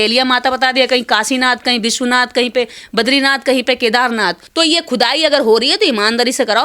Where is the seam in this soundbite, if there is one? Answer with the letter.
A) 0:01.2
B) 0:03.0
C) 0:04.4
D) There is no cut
C